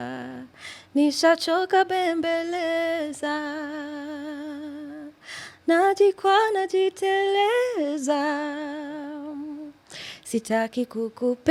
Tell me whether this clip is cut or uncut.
uncut